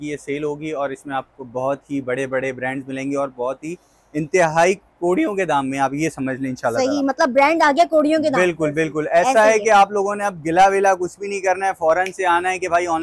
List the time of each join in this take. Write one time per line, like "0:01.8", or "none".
none